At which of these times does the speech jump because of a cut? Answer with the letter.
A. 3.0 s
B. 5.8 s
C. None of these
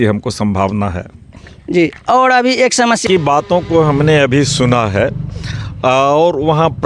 A